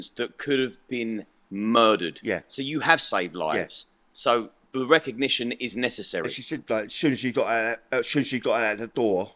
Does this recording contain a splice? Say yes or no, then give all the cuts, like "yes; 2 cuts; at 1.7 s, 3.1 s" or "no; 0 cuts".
no; 0 cuts